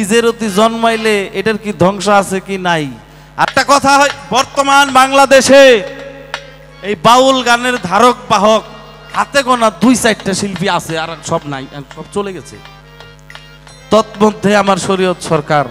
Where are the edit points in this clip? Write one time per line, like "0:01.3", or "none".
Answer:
0:03.5